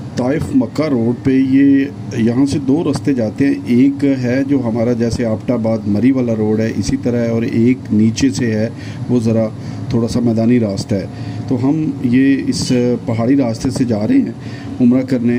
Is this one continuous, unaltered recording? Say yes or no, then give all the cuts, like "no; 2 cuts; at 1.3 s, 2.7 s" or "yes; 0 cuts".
yes; 0 cuts